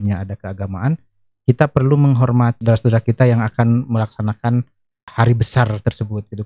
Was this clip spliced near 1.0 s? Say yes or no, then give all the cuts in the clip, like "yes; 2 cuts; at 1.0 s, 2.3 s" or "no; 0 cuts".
no; 2 cuts; at 2.6 s, 5.1 s